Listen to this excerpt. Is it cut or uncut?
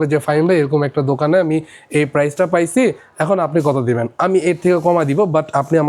uncut